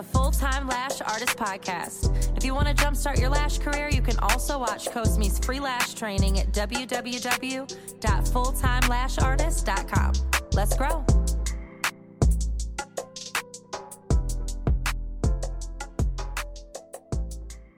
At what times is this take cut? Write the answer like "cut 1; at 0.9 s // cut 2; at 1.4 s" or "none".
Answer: none